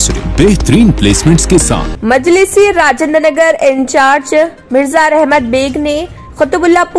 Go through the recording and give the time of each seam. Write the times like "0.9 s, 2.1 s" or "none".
1.9 s